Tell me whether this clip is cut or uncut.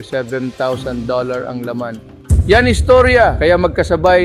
cut